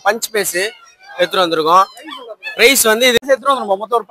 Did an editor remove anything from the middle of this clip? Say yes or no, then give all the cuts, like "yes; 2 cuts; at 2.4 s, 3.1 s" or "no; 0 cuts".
yes; 1 cut; at 3.2 s